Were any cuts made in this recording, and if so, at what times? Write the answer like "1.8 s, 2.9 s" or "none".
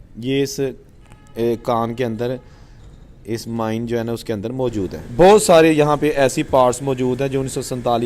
5.0 s